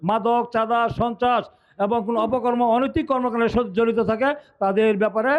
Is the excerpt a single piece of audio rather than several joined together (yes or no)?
yes